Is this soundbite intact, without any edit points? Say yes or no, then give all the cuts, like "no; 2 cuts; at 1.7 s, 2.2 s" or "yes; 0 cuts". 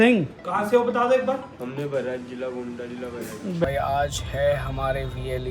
no; 1 cut; at 3.6 s